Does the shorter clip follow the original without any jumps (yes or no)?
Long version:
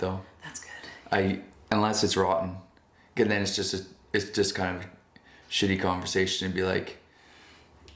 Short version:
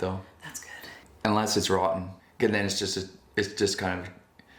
no